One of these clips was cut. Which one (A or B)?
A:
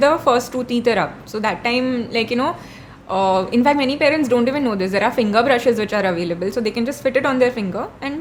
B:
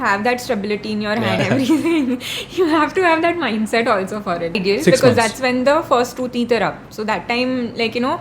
B